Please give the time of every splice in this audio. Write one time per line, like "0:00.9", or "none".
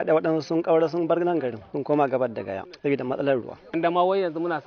0:01.6
0:02.7
0:03.7

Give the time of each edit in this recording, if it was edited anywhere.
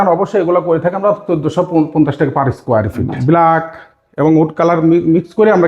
0:03.1

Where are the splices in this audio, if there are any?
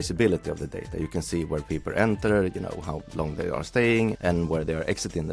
none

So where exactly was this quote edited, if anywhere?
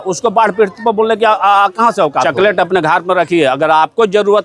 0:02.2

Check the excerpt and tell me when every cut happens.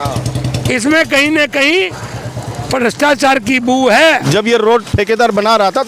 0:04.3

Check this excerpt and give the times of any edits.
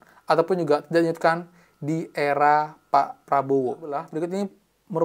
0:04.1

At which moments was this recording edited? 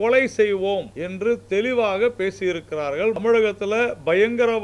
0:01.0
0:03.2

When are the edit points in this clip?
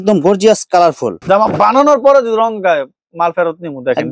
0:01.2

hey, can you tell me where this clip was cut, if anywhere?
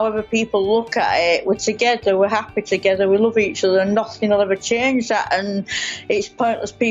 none

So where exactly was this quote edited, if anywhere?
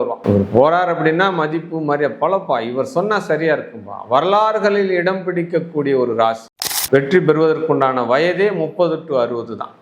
0:06.4

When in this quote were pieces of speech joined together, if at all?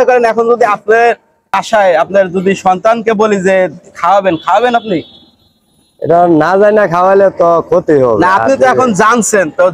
0:01.6

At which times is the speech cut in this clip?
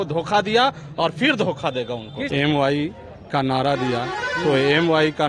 0:02.3

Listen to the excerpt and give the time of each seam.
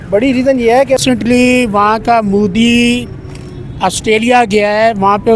0:01.0

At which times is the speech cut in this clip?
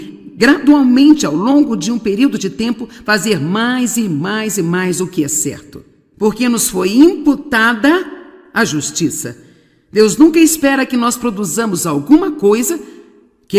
0:03.5

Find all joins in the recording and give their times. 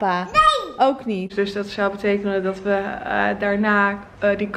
0:01.3

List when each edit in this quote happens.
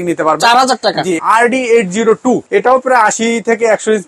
0:01.2
0:02.4

